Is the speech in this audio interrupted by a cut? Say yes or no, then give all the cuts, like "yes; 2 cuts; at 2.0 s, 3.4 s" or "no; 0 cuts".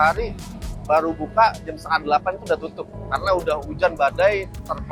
no; 0 cuts